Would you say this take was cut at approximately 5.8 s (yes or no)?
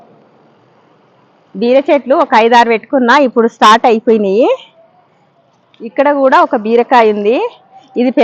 no